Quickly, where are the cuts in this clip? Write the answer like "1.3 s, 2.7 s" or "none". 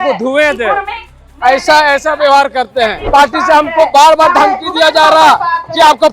3.0 s